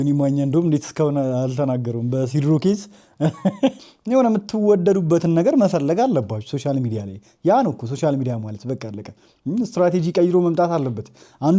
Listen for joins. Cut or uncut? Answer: cut